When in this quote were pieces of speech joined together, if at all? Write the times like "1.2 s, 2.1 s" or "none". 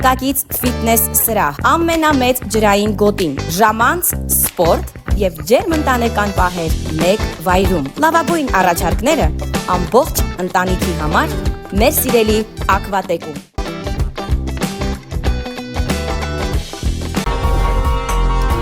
17.2 s

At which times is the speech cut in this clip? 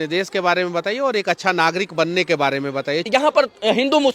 3.1 s

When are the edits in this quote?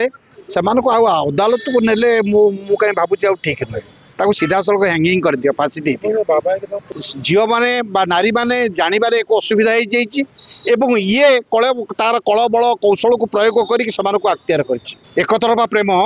6.8 s, 15.0 s

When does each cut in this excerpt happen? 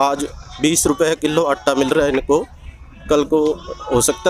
none

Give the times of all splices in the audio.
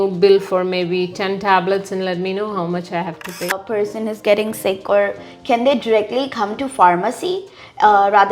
3.6 s

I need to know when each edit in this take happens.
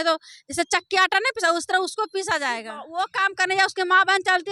2.8 s

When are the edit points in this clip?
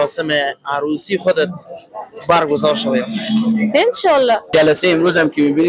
4.5 s

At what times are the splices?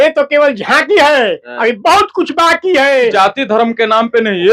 3.1 s

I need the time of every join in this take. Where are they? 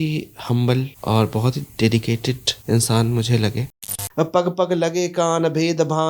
0.9 s, 2.5 s, 4.0 s

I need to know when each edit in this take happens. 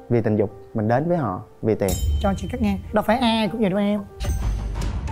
none

